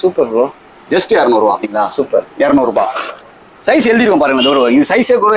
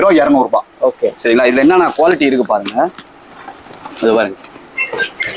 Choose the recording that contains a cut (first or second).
first